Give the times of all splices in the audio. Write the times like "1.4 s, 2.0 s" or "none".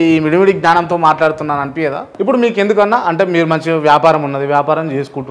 2.1 s